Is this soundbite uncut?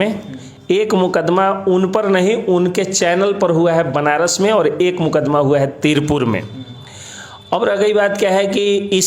yes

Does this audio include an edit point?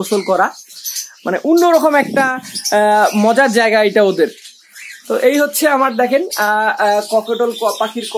no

